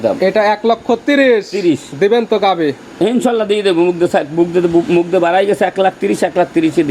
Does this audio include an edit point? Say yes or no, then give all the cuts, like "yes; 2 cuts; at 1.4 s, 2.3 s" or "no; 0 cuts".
no; 0 cuts